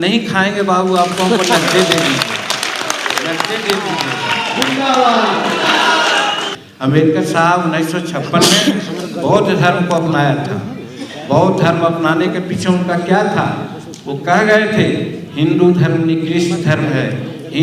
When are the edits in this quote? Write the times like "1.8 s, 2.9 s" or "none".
6.5 s